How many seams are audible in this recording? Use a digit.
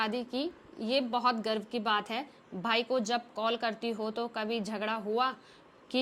0